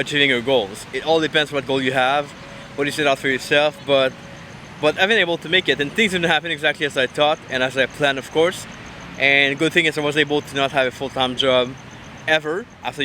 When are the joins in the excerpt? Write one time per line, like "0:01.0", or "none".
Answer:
none